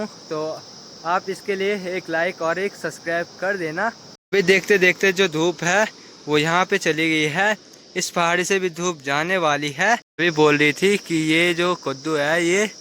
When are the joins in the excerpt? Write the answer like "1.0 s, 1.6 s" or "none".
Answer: 4.2 s, 10.1 s